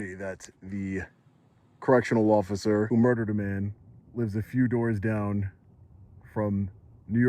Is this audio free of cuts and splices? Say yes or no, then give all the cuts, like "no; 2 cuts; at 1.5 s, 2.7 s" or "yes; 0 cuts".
no; 1 cut; at 2.9 s